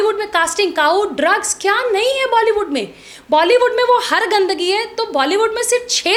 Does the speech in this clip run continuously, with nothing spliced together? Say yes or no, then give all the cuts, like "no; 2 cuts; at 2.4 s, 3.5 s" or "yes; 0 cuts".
yes; 0 cuts